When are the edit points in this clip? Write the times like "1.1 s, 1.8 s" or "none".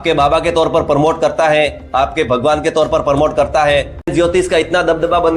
4.1 s